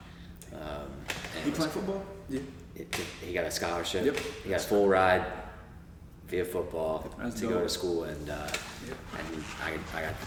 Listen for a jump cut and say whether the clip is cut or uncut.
uncut